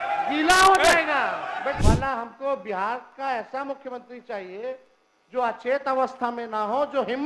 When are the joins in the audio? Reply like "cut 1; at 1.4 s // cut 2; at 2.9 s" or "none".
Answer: cut 1; at 1.8 s